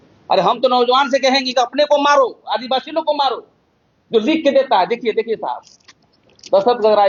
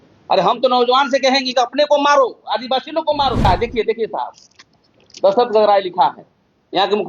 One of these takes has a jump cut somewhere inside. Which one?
second; 1 cut; at 3.5 s

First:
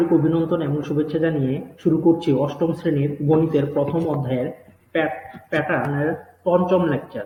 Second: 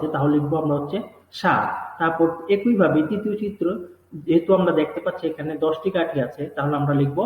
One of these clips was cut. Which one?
second; 1 cut; at 4.9 s

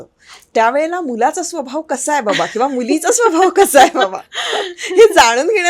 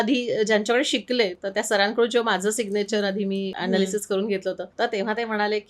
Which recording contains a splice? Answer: second; 2 cuts; at 3.5 s, 4.7 s

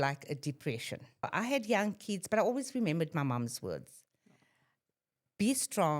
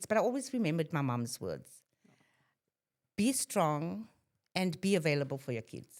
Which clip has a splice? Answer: first; 1 cut; at 1.3 s

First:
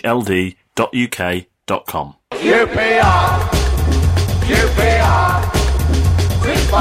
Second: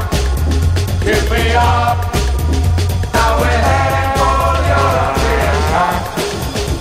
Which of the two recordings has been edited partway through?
first; 1 cut; at 2.2 s

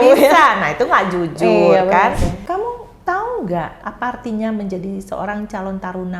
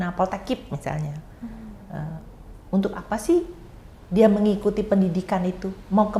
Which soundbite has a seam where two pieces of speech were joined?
first; 2 cuts; at 2.3 s, 3.8 s

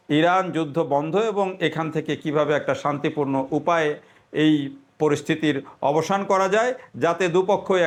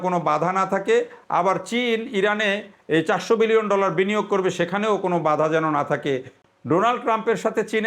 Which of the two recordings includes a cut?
second; 1 cut; at 6.4 s

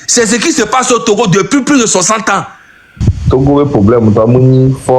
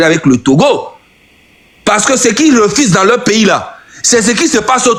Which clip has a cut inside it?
first; 1 cut; at 3.1 s

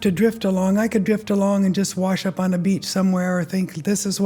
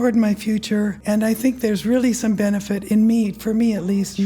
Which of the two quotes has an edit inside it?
second; 1 cut; at 1.0 s

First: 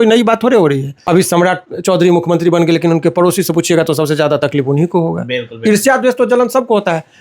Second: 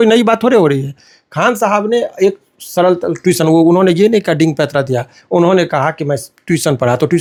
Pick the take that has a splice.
first; 1 cut; at 0.9 s

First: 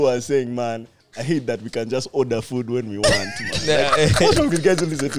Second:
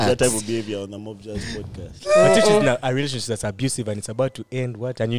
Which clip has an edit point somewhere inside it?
second; 1 cut; at 1.8 s

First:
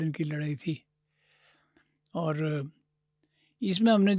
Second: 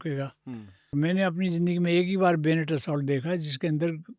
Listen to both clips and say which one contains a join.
second; 1 cut; at 0.9 s

